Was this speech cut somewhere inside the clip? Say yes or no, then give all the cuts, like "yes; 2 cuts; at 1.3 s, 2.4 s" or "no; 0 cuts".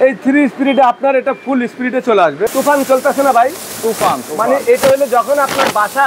yes; 1 cut; at 2.5 s